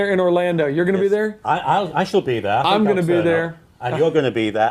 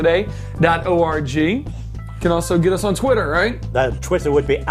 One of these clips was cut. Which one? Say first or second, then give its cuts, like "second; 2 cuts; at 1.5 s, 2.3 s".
first; 1 cut; at 2.2 s